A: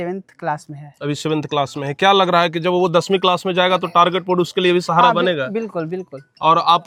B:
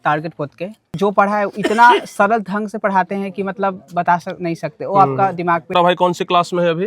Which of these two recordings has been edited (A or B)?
B